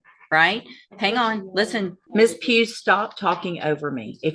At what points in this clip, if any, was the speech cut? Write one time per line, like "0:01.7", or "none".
0:02.0